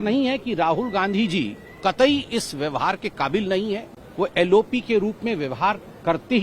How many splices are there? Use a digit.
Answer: 1